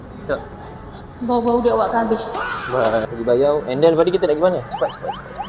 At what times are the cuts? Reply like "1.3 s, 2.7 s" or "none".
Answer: 3.1 s